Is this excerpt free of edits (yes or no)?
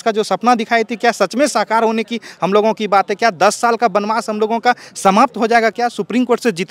yes